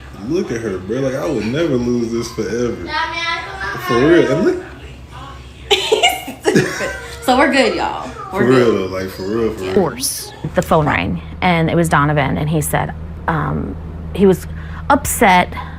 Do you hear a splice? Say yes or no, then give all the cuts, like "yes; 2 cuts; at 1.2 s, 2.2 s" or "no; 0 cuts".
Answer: yes; 1 cut; at 9.8 s